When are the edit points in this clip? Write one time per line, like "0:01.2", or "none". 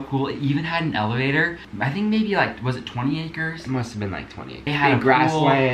0:01.8
0:04.5